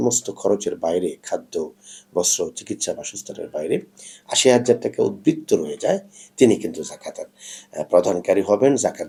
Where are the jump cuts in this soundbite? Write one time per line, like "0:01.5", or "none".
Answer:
none